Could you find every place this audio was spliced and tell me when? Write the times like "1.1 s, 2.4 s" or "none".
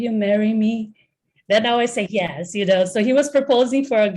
none